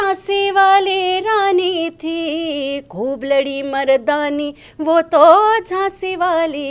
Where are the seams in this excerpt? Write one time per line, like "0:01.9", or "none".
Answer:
none